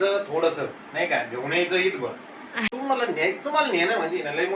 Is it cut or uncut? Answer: cut